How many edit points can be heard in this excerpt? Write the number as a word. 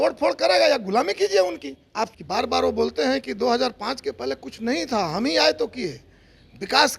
one